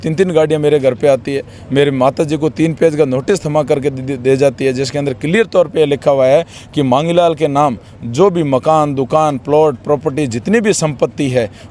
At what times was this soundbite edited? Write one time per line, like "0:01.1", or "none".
none